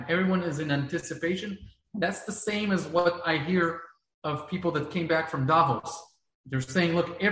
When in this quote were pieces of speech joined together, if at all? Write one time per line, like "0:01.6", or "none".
none